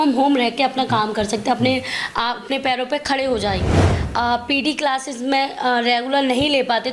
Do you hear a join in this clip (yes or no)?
yes